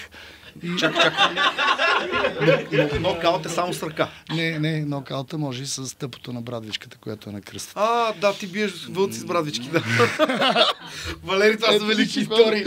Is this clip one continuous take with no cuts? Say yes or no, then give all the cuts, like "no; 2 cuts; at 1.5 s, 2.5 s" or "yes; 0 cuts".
yes; 0 cuts